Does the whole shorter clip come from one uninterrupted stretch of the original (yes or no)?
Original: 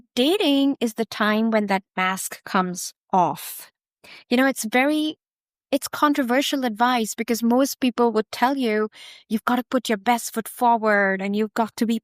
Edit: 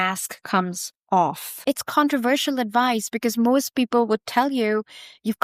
no